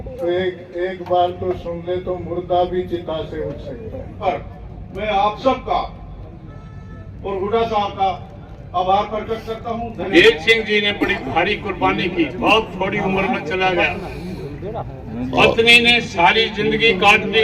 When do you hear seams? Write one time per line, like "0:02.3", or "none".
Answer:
0:04.2
0:10.1